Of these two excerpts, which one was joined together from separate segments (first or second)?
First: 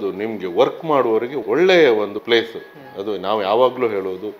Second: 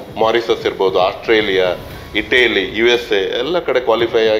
first